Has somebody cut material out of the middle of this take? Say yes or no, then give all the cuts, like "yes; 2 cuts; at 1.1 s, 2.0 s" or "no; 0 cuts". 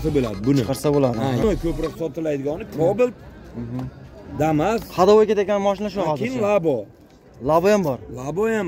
yes; 1 cut; at 1.4 s